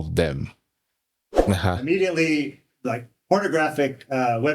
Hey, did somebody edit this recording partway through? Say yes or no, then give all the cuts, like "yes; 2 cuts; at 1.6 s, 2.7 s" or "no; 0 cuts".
yes; 1 cut; at 1.3 s